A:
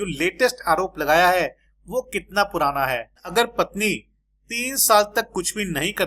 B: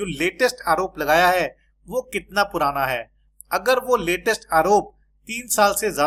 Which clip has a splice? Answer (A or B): A